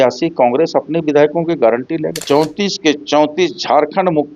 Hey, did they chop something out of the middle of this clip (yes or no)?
yes